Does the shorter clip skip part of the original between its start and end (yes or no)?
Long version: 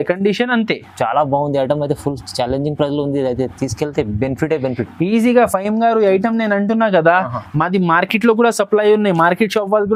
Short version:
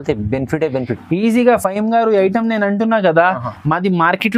no